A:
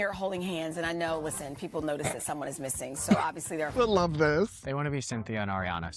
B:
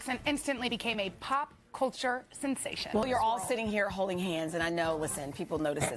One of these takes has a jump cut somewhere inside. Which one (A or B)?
A